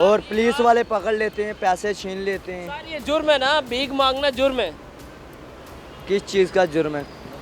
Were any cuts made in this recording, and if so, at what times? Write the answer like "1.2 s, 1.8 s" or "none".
none